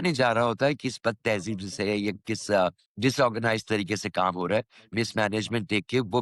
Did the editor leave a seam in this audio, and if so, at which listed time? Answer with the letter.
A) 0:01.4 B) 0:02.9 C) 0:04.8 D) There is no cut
B